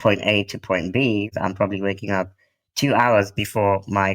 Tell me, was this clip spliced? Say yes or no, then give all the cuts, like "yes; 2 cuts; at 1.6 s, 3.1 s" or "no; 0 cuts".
yes; 1 cut; at 1.3 s